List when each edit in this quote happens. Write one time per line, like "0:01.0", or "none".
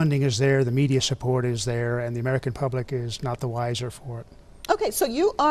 0:02.5